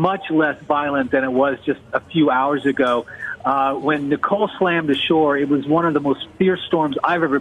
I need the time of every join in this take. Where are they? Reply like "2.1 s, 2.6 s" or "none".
5.2 s